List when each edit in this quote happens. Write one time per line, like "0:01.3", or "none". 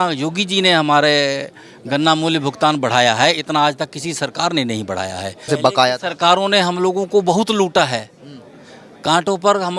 0:05.5